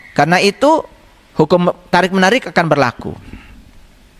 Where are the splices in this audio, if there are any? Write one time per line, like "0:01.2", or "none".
none